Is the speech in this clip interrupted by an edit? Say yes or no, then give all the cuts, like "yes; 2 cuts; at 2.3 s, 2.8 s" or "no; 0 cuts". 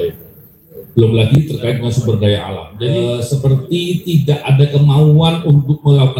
yes; 1 cut; at 3.0 s